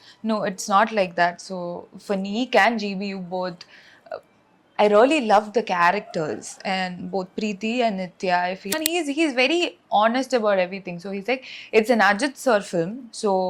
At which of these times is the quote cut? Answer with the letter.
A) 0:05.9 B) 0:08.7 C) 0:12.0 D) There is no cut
B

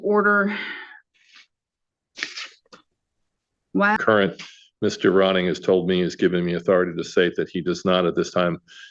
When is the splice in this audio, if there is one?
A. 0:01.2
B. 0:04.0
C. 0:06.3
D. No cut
B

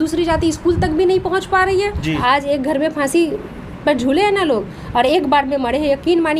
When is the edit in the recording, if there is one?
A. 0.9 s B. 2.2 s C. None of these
B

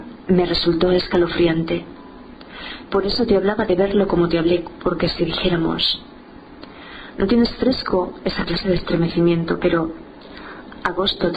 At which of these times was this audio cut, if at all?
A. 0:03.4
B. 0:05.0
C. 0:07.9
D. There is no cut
C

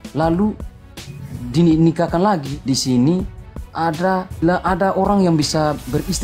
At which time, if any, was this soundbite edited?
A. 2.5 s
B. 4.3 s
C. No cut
A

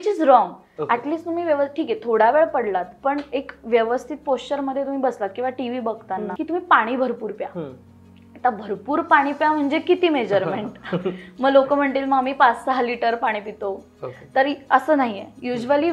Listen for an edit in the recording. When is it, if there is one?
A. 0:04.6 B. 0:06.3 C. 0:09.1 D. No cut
B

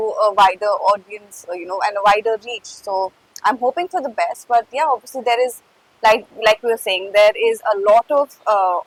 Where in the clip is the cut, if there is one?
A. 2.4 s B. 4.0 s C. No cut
C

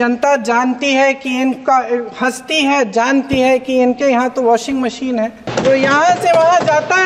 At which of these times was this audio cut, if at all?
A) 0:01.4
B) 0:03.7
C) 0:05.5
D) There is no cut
C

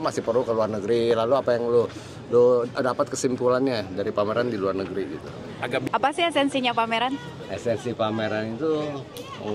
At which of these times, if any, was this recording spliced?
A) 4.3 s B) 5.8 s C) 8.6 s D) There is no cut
B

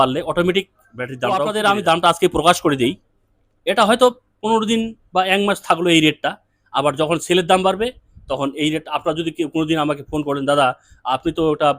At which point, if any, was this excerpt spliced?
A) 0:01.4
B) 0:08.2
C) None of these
A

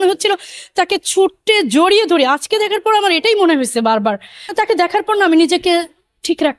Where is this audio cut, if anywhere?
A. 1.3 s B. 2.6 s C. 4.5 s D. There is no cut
C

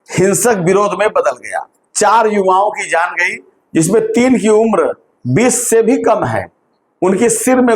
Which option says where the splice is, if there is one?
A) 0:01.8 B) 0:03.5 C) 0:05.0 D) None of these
A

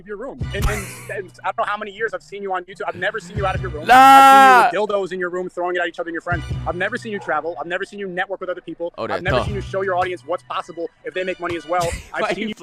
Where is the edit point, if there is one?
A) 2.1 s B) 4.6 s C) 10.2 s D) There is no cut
D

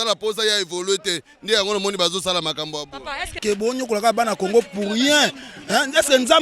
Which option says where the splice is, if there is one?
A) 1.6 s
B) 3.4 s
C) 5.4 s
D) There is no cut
B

